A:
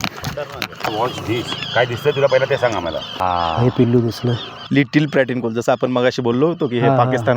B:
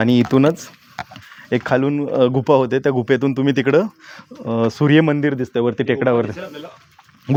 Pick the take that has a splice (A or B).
A